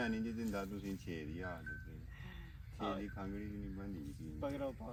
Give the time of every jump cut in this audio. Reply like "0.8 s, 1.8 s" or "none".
none